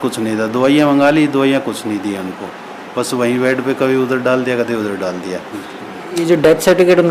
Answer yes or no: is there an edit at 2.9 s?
no